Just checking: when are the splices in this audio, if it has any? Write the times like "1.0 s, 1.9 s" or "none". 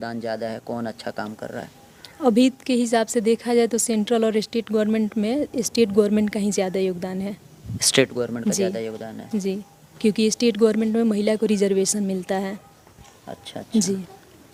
none